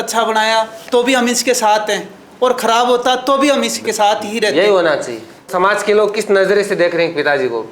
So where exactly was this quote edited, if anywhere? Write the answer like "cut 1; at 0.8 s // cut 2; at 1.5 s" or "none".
none